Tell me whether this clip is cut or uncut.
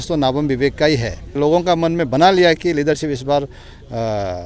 cut